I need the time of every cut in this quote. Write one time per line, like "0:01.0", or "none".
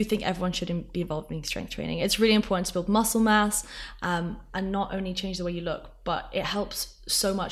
none